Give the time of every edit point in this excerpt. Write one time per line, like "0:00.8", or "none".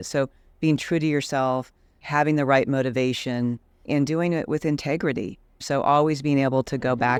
none